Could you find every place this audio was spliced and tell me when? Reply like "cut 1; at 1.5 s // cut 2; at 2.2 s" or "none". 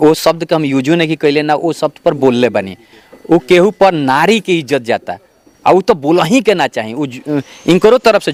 none